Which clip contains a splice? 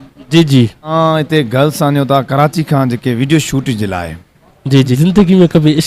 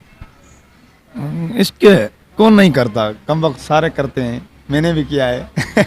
first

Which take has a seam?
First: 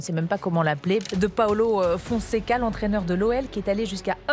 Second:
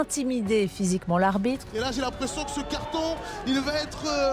second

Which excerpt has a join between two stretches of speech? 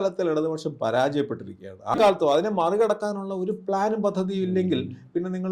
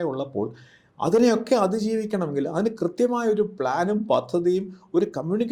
first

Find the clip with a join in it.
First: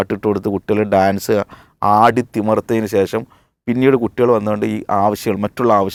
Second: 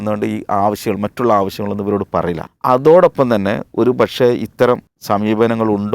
second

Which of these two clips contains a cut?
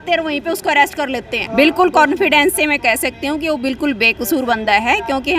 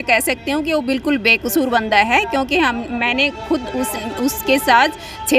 first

